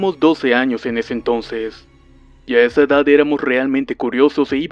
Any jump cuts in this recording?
no; 0 cuts

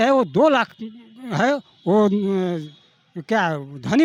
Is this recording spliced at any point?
no; 0 cuts

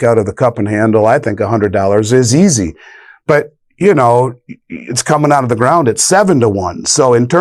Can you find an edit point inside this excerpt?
no; 0 cuts

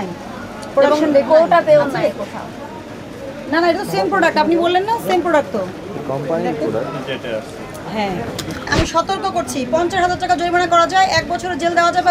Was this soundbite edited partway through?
yes; 1 cut; at 8.7 s

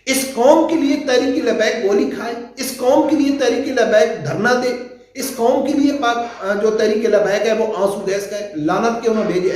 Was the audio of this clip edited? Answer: no; 0 cuts

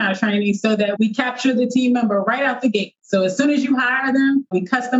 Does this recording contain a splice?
yes; 1 cut; at 0.9 s

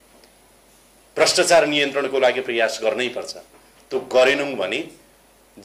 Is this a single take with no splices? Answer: yes; 0 cuts

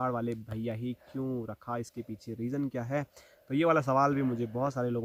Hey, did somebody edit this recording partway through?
no; 0 cuts

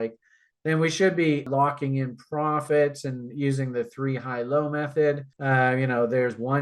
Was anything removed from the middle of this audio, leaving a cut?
yes; 2 cuts; at 1.5 s, 5.3 s

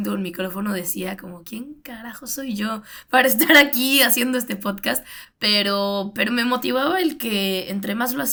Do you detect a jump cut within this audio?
no; 0 cuts

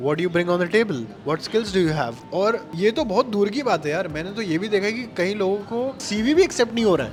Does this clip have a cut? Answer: no; 0 cuts

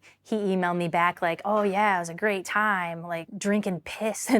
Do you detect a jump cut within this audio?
yes; 1 cut; at 3.3 s

